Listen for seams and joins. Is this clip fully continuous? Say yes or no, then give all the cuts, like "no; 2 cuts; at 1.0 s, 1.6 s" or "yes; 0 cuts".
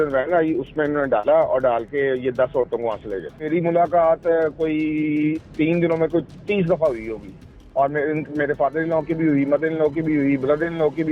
no; 1 cut; at 3.4 s